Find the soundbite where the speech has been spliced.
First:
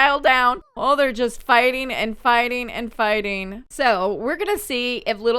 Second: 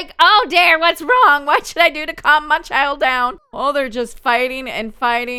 first; 1 cut; at 3.6 s

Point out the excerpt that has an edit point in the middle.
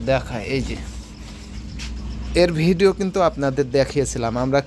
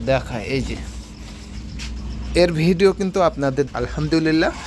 second; 1 cut; at 3.7 s

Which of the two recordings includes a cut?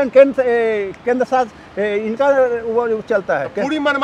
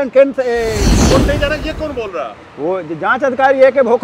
second; 1 cut; at 0.9 s

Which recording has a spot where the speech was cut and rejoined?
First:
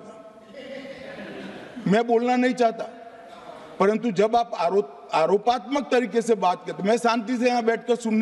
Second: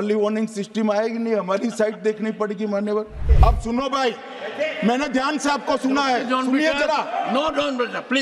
second; 1 cut; at 3.2 s

